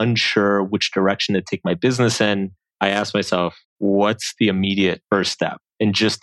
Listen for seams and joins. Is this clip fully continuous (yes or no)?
no